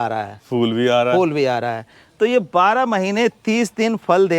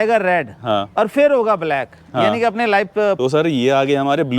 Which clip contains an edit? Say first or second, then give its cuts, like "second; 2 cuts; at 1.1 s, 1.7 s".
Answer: second; 1 cut; at 3.2 s